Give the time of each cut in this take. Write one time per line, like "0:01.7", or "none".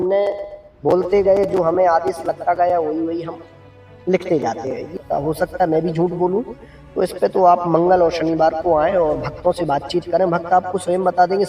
0:04.9